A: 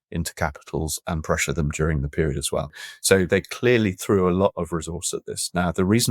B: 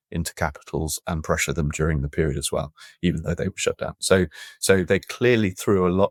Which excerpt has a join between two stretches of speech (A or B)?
A